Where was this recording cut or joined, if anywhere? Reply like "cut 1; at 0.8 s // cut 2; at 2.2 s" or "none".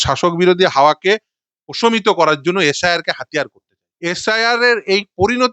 cut 1; at 3.8 s